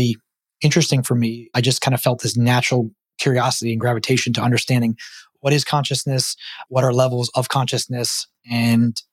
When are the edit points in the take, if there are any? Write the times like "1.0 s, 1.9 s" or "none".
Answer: 1.5 s, 6.6 s